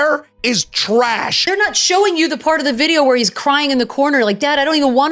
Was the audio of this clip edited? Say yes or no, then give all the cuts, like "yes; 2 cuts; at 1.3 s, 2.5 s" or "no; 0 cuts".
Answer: yes; 1 cut; at 1.8 s